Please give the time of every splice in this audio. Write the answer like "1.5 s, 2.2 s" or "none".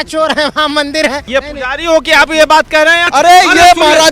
1.2 s, 3.1 s